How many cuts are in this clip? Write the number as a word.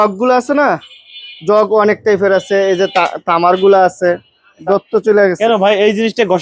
one